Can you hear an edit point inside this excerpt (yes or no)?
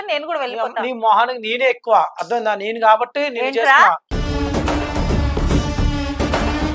no